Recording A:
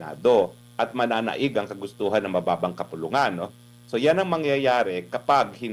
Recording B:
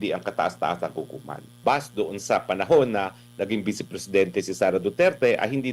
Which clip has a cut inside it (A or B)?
B